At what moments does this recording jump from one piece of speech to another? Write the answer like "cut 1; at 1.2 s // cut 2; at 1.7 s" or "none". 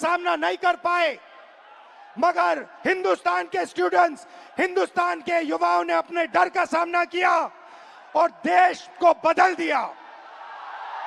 none